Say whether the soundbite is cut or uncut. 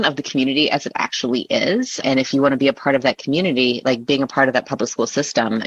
cut